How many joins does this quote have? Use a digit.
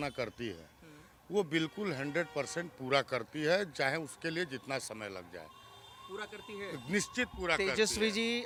0